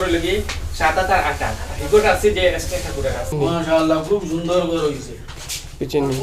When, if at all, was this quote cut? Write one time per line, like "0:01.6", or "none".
0:03.3